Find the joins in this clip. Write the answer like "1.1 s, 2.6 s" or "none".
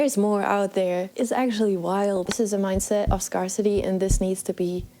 1.1 s, 2.3 s